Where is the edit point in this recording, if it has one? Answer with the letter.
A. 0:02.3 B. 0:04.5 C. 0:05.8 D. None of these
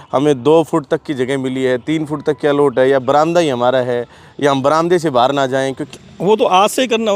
C